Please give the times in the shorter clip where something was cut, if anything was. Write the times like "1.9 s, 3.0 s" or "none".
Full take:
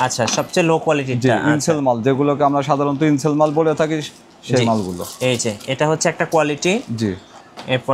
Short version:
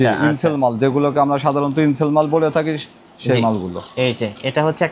none